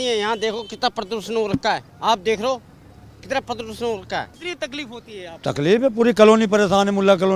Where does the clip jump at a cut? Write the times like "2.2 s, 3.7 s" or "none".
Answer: 1.9 s, 4.4 s